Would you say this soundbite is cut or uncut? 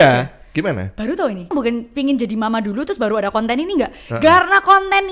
cut